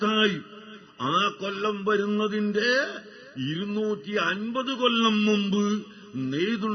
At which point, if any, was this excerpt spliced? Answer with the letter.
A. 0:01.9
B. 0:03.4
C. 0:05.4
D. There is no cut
A